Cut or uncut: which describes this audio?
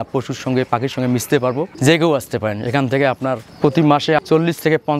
uncut